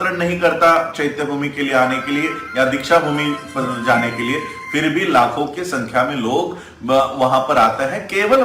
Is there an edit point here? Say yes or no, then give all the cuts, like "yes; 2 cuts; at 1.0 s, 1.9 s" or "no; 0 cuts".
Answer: no; 0 cuts